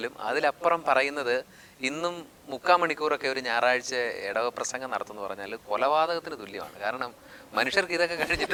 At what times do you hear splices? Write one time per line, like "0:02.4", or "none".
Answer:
none